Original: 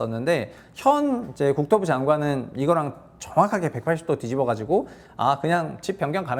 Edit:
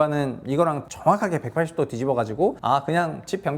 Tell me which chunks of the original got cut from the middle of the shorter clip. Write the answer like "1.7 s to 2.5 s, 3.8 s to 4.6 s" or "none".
3.0 s to 3.2 s, 4.9 s to 5.1 s